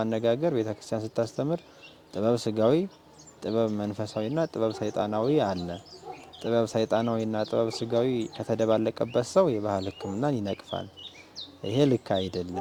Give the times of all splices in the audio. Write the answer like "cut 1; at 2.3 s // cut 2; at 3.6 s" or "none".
none